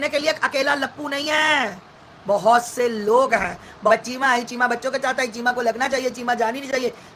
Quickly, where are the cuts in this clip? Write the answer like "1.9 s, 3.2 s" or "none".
3.9 s